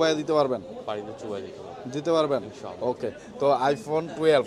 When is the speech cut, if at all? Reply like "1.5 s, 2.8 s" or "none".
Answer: none